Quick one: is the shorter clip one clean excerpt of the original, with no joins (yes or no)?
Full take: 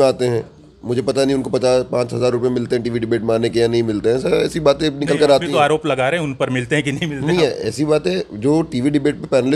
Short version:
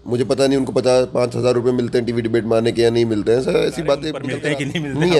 no